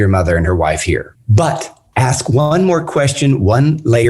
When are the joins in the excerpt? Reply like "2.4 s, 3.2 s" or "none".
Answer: 1.2 s

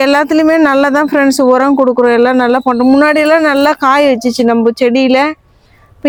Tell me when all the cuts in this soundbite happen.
none

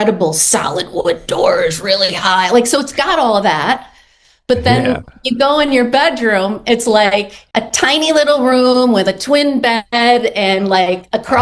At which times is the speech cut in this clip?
7.4 s

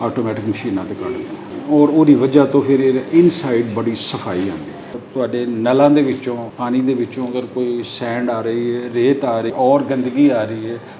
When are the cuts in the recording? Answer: 1.5 s, 5.0 s, 6.5 s, 9.5 s

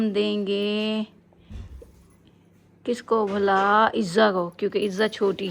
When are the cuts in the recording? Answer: none

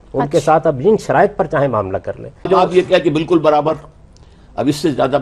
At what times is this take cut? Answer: 2.5 s

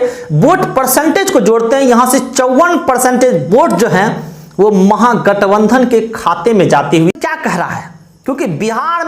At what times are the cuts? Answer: 7.1 s

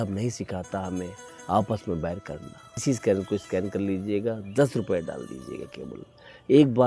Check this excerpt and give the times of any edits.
2.8 s

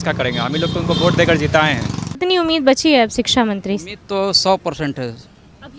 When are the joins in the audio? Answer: 2.2 s

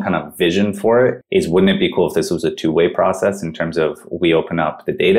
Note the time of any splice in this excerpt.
1.2 s

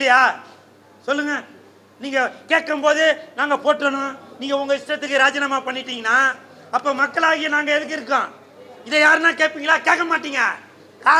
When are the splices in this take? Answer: none

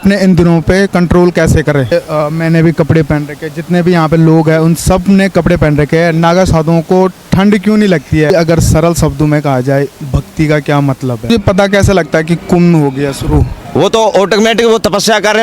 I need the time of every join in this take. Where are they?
1.9 s, 8.3 s, 11.3 s

